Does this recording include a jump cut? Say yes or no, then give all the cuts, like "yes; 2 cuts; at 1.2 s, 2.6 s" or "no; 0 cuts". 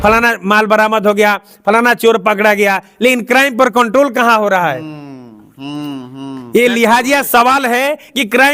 no; 0 cuts